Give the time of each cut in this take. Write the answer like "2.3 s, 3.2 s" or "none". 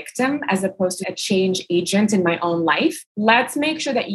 1.1 s, 3.1 s